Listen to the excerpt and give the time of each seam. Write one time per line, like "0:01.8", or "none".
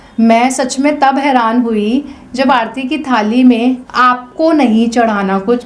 0:04.3